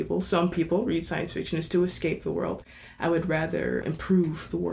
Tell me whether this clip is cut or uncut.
cut